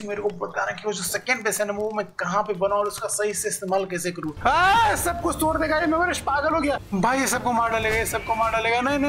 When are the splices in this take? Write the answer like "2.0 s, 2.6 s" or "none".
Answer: 4.3 s, 6.8 s